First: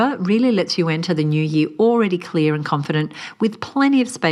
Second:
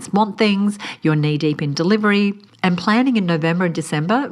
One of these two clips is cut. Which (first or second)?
second